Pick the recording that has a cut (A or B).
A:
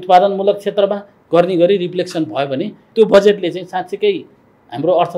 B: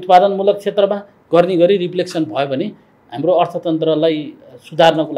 B